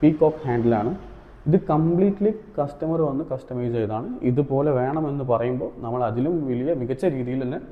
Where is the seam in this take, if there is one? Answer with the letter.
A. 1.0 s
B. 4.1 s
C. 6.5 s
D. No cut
D